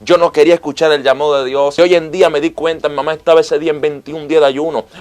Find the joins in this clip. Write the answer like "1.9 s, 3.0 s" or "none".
1.7 s